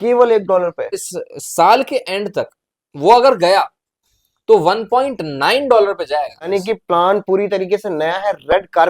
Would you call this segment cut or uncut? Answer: cut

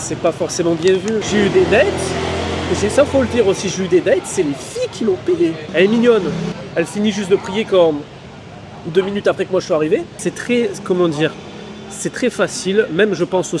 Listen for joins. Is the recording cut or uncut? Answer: cut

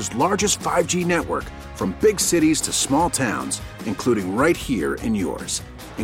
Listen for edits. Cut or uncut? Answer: uncut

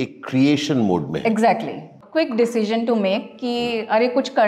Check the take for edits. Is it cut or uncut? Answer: cut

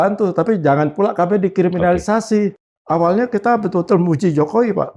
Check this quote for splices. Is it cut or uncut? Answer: cut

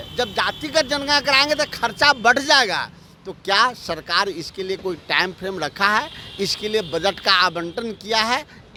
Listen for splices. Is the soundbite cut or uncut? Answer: uncut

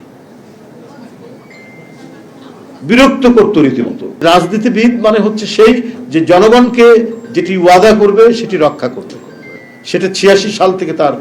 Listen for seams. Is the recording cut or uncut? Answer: cut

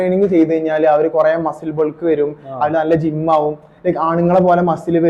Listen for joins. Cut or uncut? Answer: uncut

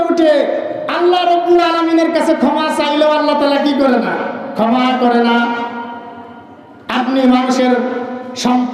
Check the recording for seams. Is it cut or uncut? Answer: uncut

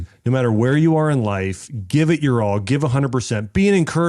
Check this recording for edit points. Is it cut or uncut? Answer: uncut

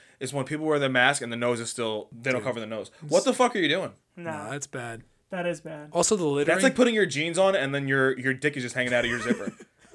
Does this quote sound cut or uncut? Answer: uncut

